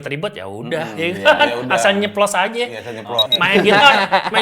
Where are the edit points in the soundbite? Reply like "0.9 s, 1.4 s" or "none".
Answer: 3.3 s